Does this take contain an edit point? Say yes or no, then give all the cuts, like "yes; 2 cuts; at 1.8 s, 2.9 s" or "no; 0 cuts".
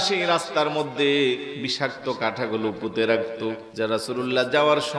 yes; 2 cuts; at 1.6 s, 3.6 s